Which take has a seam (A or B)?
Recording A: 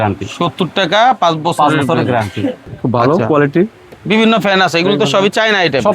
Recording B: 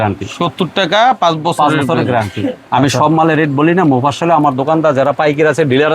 A